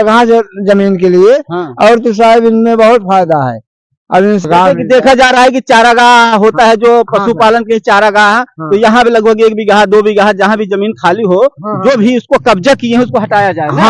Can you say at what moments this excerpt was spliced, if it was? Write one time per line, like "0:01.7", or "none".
0:04.4